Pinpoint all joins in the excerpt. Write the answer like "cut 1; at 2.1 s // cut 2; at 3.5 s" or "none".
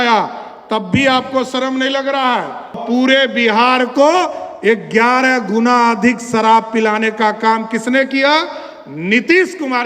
cut 1; at 2.8 s